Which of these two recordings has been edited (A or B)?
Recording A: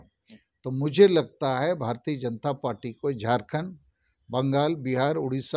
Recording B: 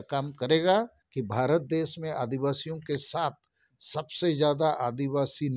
B